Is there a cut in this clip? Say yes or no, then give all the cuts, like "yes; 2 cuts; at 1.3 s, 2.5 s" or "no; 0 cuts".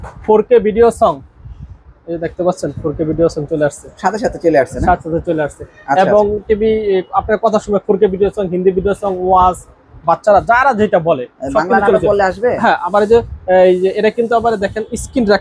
no; 0 cuts